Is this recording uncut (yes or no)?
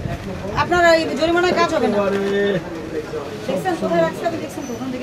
yes